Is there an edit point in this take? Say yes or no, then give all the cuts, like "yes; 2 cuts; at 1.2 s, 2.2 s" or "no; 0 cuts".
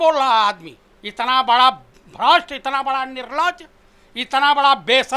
yes; 1 cut; at 1.1 s